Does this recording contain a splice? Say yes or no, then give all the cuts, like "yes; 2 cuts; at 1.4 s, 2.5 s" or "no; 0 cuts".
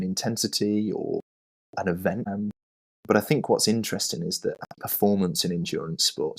yes; 2 cuts; at 2.3 s, 4.7 s